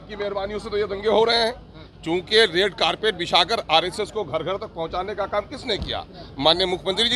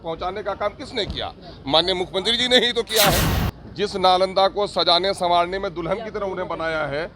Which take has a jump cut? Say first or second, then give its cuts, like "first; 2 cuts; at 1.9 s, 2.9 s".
second; 1 cut; at 3.4 s